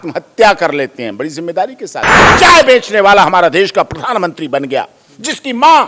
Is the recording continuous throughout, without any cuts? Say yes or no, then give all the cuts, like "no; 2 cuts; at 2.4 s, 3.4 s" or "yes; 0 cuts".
no; 1 cut; at 2.2 s